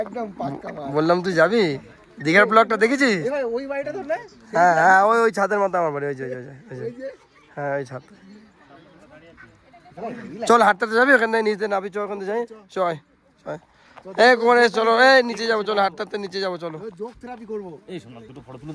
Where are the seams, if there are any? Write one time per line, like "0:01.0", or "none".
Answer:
none